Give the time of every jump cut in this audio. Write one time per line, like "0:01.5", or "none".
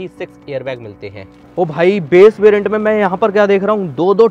0:01.4

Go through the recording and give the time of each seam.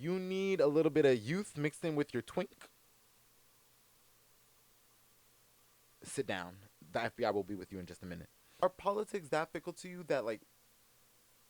0:08.6

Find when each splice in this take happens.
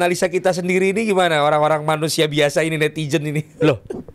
none

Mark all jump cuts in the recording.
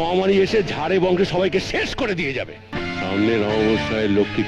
0:02.7

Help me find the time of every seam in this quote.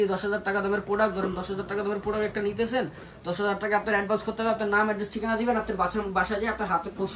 none

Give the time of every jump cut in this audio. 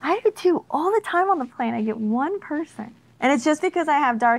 none

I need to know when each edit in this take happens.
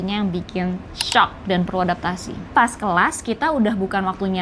0:02.5

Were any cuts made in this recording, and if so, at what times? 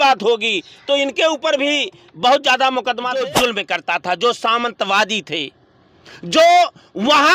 0:03.2

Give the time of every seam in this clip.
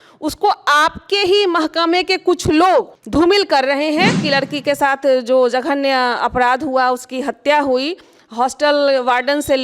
0:03.0
0:04.2

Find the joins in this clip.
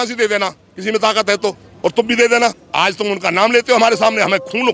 0:01.7
0:02.6

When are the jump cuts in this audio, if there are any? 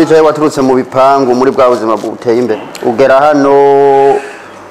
0:02.7

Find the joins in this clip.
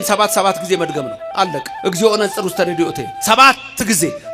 0:01.2
0:03.1

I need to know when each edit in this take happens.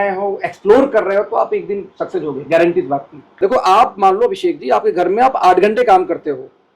0:03.4

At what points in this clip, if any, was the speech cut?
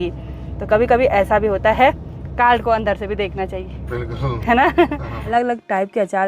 0:05.3

